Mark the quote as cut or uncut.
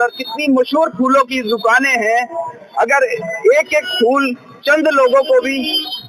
uncut